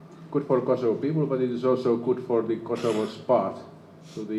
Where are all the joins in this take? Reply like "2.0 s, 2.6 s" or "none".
none